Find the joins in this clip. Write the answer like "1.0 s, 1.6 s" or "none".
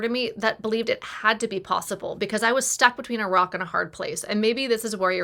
none